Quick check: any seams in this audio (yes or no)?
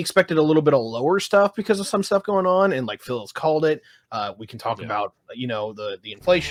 no